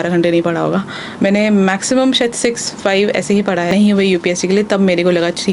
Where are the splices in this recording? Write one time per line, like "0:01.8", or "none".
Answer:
0:03.7